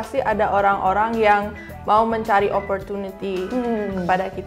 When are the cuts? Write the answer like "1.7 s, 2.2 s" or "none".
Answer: none